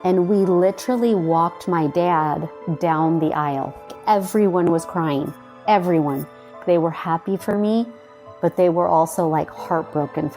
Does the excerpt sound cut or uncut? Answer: cut